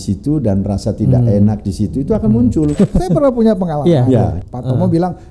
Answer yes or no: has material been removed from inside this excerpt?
yes